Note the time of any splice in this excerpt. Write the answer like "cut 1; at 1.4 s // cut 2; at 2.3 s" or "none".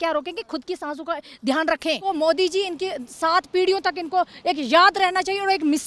cut 1; at 2.0 s